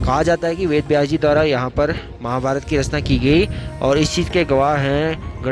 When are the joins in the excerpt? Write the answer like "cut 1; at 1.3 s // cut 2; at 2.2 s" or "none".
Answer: none